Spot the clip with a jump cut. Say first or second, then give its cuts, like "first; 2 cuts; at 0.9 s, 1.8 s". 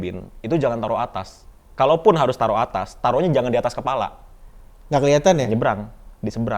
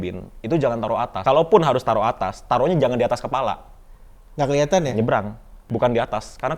second; 2 cuts; at 1.1 s, 5.7 s